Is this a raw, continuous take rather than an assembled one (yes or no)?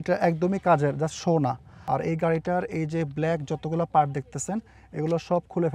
no